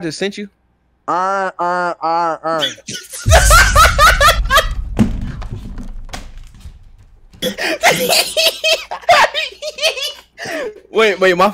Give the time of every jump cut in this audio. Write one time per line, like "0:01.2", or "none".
none